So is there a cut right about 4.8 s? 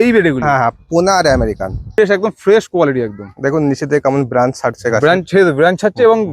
no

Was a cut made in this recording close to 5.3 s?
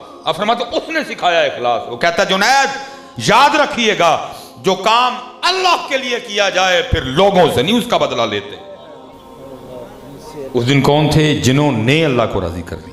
no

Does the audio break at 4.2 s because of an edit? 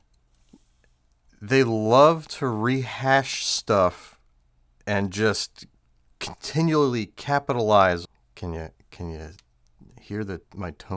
no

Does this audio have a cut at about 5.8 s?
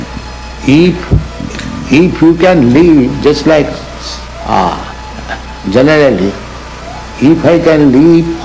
yes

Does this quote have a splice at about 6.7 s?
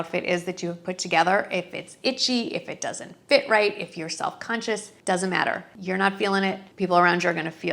yes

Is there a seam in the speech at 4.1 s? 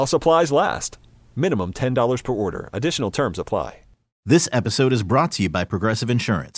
yes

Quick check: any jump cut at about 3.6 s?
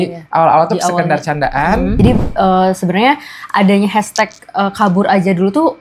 no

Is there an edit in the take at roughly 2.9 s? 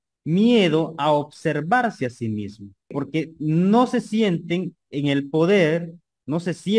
yes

